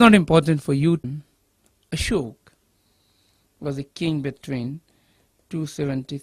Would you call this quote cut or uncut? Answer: uncut